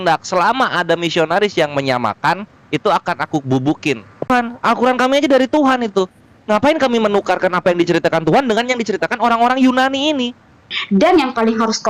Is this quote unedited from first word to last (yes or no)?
no